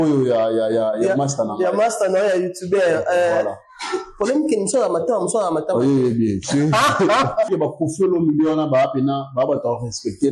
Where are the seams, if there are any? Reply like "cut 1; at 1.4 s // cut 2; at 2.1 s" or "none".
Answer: cut 1; at 7.5 s

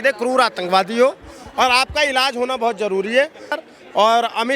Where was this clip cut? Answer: cut 1; at 3.6 s

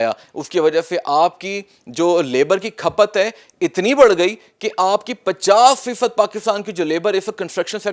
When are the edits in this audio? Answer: none

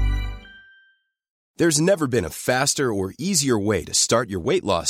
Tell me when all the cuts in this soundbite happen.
cut 1; at 1.4 s

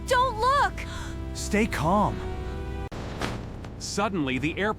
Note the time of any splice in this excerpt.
cut 1; at 2.9 s

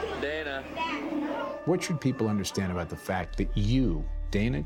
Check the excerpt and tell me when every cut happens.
none

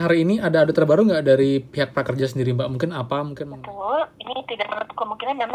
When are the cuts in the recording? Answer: cut 1; at 3.5 s

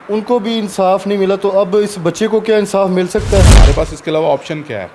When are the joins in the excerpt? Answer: cut 1; at 3.5 s

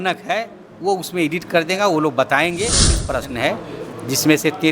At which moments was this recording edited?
cut 1; at 3.0 s

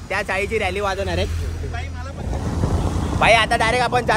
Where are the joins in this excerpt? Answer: cut 1; at 2.2 s

